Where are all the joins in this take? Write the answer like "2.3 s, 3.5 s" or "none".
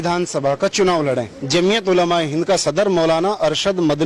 1.4 s